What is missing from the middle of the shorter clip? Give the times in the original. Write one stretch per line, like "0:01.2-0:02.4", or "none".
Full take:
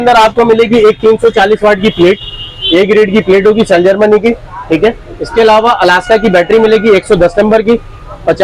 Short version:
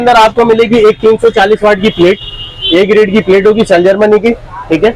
none